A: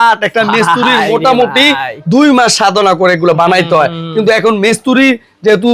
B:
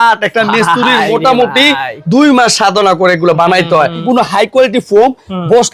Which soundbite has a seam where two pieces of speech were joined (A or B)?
B